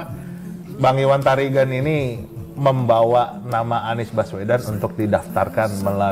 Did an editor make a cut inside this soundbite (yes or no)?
no